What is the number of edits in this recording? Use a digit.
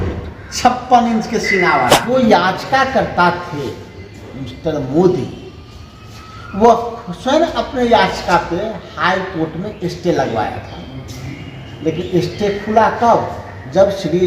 1